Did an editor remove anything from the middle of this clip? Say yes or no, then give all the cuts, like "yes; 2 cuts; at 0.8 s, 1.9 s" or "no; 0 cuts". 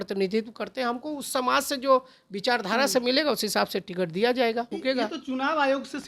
yes; 1 cut; at 4.7 s